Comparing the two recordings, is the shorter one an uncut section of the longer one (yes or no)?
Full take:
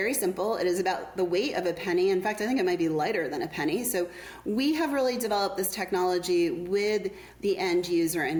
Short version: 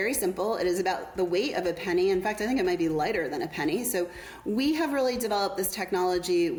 yes